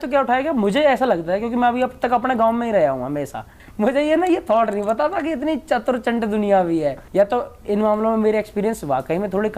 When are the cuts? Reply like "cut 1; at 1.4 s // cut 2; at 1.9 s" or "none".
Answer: cut 1; at 3.5 s // cut 2; at 7.0 s